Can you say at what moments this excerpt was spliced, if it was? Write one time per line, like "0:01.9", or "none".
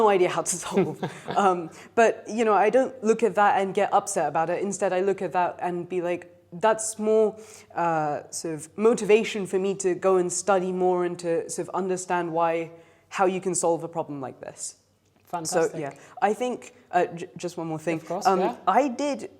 none